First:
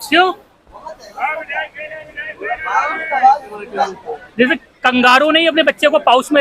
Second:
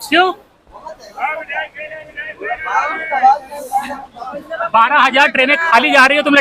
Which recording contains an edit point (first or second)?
first